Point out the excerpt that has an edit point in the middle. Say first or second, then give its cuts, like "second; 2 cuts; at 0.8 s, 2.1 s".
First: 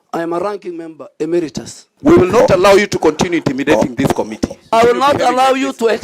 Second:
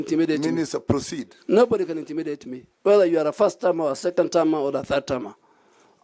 first; 1 cut; at 1.9 s